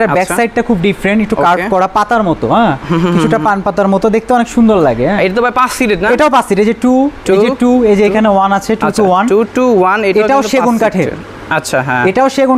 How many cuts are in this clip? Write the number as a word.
zero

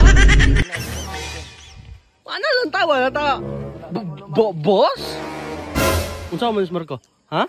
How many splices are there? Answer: one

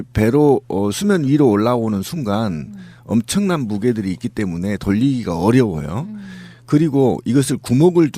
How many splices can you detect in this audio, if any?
zero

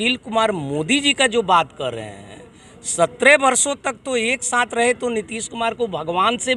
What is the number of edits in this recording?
zero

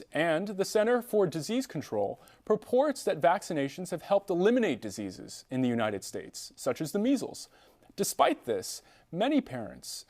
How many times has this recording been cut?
one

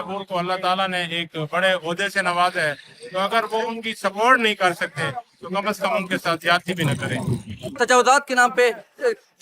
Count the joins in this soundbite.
one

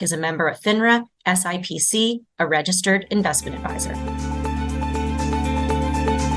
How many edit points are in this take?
one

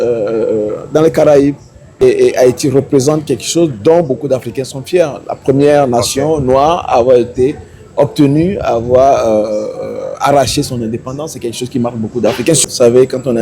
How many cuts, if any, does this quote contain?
two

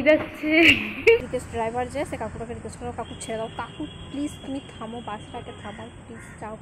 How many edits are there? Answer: one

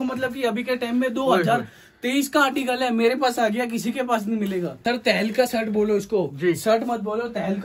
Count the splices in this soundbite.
one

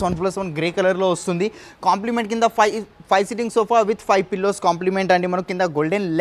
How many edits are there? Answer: zero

